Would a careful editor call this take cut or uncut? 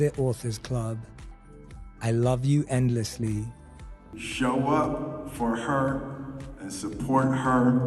cut